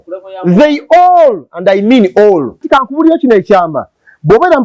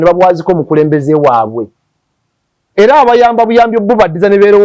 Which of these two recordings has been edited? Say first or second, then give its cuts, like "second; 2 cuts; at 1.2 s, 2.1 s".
first; 1 cut; at 2.6 s